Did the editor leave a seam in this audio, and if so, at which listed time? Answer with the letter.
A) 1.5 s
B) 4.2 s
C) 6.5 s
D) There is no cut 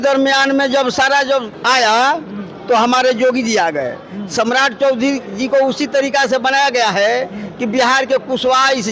A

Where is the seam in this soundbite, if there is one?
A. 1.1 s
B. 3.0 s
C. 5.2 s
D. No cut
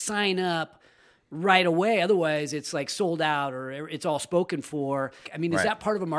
C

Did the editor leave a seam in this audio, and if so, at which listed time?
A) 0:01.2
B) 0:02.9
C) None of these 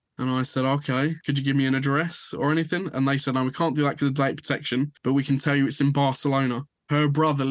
A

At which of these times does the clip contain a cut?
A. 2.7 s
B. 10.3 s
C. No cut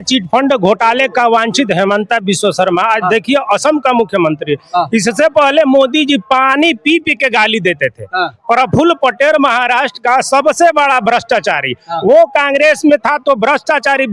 C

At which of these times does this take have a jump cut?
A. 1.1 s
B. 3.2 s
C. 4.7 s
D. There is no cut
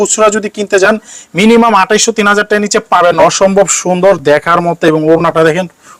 B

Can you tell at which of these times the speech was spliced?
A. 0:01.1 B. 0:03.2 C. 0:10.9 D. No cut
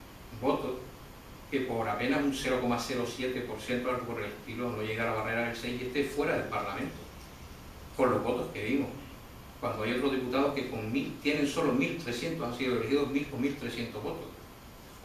B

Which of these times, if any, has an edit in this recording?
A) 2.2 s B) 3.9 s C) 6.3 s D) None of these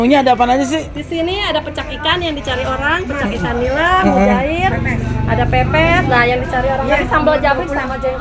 D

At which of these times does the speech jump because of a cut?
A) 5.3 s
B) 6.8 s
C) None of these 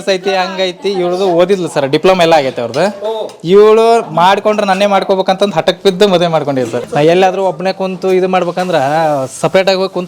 B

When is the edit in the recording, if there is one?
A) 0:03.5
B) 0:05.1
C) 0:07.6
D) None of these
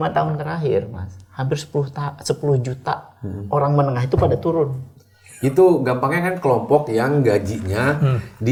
D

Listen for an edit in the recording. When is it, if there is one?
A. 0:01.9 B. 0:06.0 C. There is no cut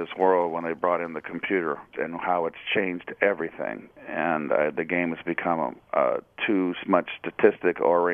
A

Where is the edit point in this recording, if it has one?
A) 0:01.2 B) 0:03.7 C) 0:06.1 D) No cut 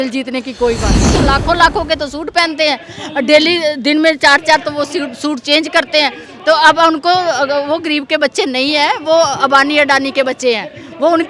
A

